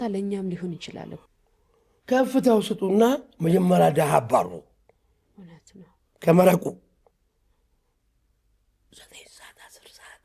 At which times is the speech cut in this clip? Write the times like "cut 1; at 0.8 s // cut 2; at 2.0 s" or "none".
cut 1; at 1.2 s